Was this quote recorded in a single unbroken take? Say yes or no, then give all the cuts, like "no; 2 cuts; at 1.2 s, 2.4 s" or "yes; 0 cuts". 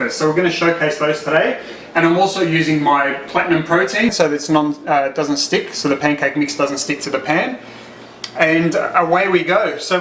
yes; 0 cuts